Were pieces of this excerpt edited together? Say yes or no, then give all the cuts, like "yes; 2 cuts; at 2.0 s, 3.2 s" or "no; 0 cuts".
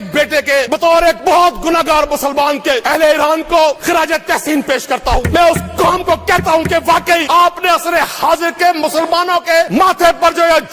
yes; 6 cuts; at 1.0 s, 2.8 s, 3.8 s, 5.3 s, 7.2 s, 9.7 s